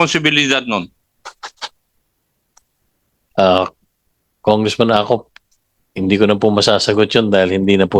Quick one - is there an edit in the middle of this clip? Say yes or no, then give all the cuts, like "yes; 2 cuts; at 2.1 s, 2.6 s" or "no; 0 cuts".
no; 0 cuts